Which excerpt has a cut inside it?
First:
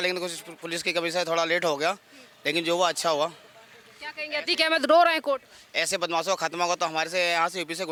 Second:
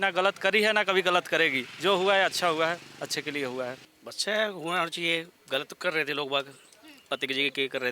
second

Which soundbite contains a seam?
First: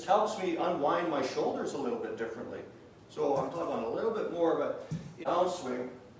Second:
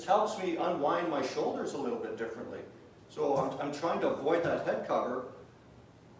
first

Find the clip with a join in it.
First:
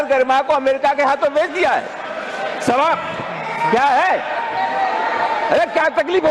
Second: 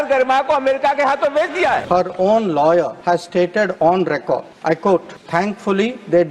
second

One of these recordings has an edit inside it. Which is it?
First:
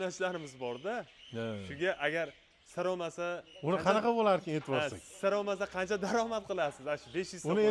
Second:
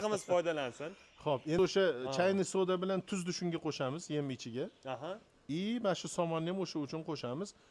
second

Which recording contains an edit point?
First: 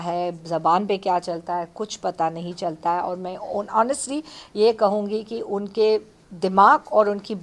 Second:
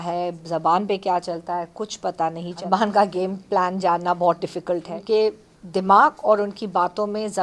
second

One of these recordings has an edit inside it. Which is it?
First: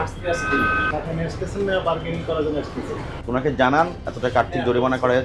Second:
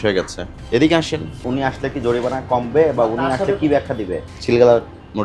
second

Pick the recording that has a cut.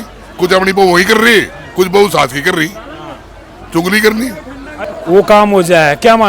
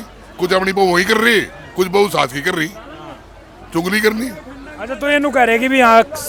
first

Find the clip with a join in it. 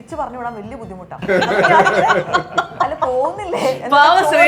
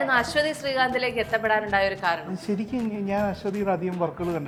first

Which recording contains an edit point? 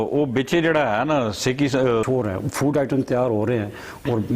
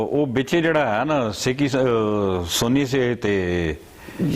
first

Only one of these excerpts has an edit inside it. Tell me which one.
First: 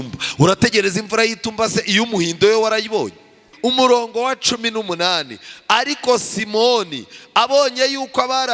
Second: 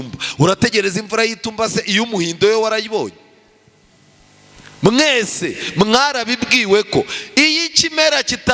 first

